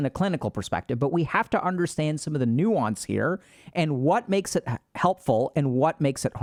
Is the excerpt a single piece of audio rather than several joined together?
yes; 0 cuts

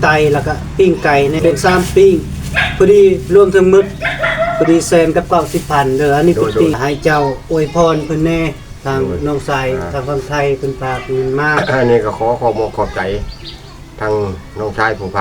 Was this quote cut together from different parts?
yes; 2 cuts; at 1.4 s, 6.7 s

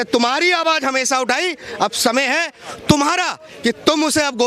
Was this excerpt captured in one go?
yes; 0 cuts

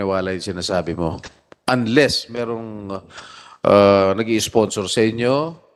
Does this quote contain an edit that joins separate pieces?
no; 0 cuts

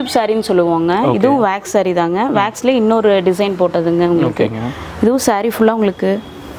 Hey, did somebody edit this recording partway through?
no; 0 cuts

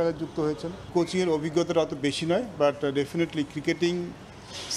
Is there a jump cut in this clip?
yes; 1 cut; at 0.9 s

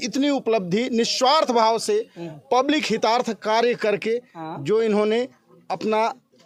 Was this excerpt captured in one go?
yes; 0 cuts

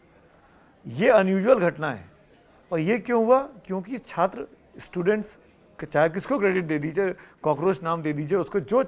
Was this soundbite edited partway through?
no; 0 cuts

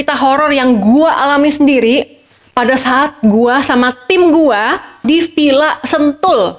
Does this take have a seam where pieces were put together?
yes; 1 cut; at 5.1 s

